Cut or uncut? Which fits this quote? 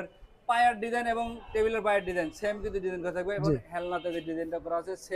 uncut